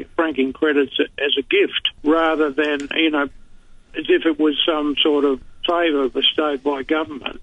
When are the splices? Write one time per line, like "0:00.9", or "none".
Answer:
0:01.9
0:05.4